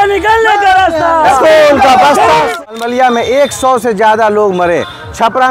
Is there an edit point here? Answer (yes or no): yes